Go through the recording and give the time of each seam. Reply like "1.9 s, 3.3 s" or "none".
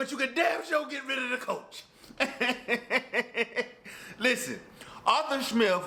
none